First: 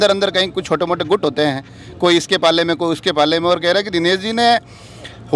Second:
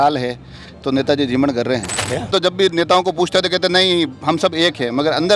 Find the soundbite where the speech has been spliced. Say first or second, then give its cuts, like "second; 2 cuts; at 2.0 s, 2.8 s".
second; 1 cut; at 2.3 s